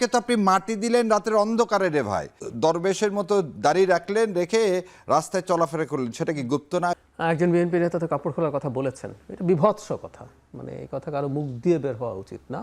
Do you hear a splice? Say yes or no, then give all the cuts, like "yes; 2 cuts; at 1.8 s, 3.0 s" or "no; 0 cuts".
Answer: yes; 2 cuts; at 2.4 s, 6.9 s